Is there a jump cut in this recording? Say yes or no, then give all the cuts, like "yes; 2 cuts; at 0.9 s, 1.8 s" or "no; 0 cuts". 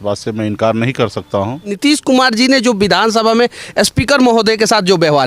yes; 1 cut; at 1.6 s